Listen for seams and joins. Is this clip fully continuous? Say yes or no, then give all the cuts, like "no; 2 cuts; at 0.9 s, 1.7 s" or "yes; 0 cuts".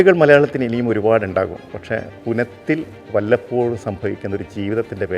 no; 2 cuts; at 2.0 s, 3.0 s